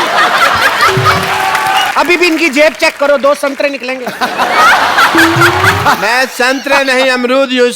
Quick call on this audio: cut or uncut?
cut